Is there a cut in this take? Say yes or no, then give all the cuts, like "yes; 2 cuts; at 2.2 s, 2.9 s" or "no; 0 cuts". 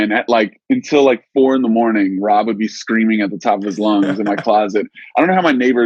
no; 0 cuts